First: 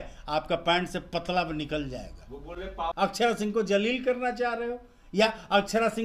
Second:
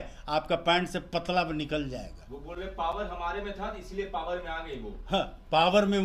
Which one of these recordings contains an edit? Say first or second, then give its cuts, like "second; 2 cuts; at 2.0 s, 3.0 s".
first; 1 cut; at 2.9 s